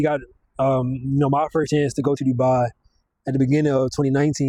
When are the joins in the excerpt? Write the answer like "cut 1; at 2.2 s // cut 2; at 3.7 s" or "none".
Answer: none